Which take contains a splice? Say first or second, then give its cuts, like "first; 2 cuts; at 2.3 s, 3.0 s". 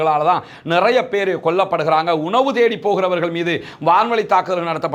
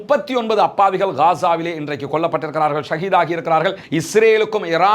second; 1 cut; at 3.8 s